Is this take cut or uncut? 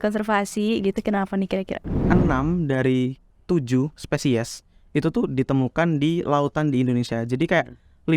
cut